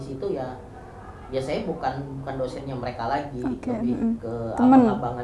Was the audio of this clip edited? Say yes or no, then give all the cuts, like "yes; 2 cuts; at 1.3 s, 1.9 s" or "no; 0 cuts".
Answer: no; 0 cuts